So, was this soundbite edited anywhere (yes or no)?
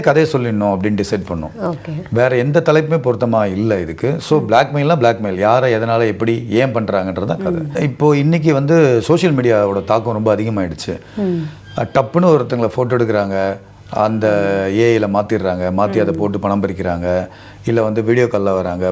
yes